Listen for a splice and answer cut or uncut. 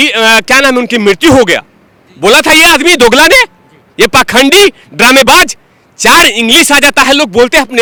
uncut